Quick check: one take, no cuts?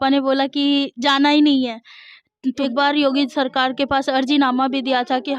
no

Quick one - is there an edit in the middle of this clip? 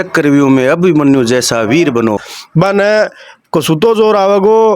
yes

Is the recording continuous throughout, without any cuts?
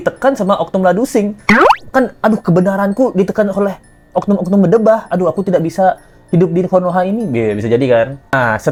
yes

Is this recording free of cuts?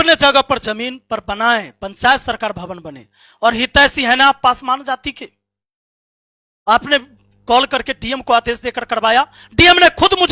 yes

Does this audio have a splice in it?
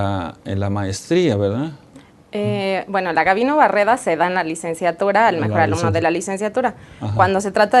yes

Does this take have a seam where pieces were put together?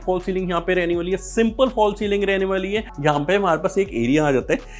yes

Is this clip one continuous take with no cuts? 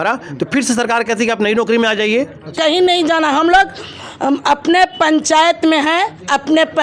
no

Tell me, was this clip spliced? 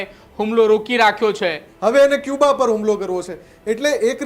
yes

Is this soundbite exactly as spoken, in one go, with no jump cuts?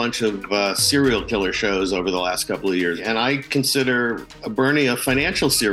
no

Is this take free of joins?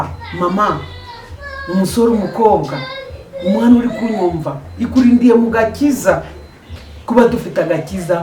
yes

